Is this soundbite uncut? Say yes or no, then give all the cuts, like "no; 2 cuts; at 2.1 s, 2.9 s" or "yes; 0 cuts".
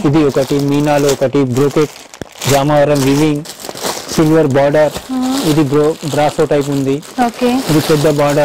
yes; 0 cuts